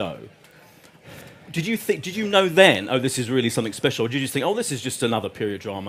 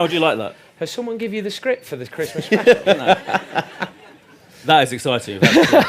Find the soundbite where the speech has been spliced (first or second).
second